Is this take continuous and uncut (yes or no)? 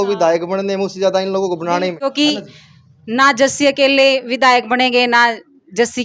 yes